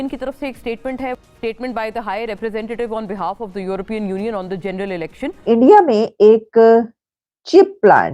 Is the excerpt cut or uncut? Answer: cut